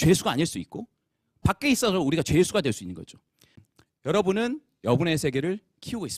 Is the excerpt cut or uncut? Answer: cut